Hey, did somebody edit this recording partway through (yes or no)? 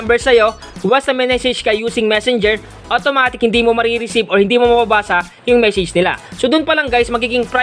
yes